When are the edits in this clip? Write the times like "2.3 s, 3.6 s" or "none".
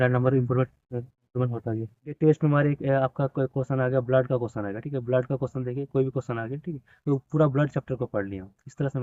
2.1 s